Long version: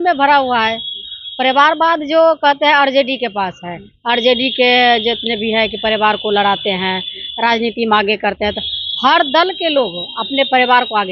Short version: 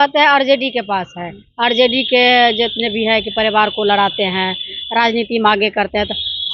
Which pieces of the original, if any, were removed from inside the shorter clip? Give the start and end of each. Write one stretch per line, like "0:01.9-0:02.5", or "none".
none